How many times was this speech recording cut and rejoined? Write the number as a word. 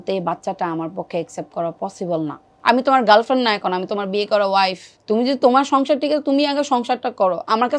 two